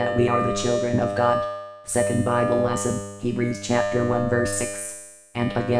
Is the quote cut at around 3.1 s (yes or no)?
no